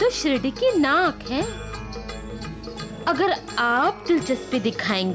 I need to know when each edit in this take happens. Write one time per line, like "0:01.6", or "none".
none